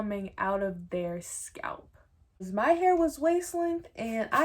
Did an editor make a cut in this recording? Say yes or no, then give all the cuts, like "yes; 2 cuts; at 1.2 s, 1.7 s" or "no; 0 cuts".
yes; 1 cut; at 2.5 s